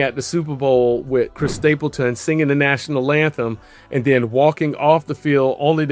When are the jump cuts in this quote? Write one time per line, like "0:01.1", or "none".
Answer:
0:01.4